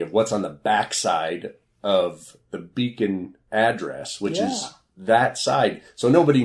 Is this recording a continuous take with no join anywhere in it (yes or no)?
no